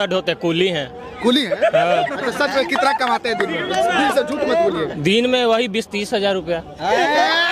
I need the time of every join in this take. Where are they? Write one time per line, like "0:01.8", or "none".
none